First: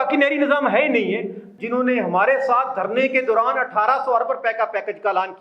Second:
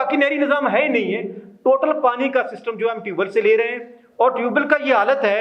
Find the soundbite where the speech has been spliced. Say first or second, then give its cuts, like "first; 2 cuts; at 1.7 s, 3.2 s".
first; 1 cut; at 1.5 s